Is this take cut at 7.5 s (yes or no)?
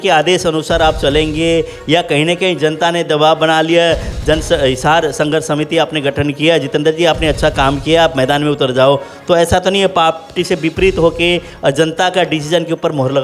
no